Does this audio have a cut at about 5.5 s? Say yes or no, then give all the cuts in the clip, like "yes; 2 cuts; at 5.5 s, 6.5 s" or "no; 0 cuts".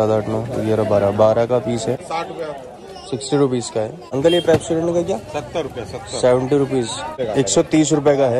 no; 3 cuts; at 2.1 s, 4.0 s, 7.1 s